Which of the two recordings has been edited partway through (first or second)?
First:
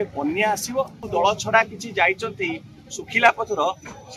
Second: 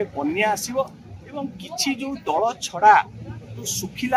first